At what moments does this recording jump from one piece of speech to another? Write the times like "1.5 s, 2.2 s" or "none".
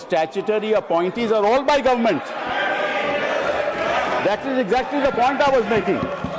none